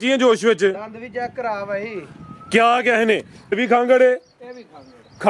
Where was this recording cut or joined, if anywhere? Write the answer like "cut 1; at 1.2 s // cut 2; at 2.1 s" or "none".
cut 1; at 3.5 s